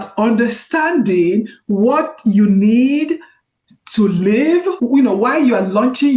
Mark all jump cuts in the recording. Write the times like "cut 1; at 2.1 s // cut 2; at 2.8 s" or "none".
cut 1; at 4.8 s